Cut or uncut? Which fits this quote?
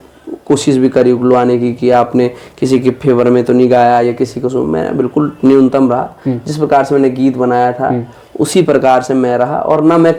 uncut